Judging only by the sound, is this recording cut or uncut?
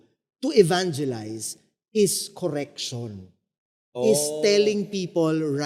uncut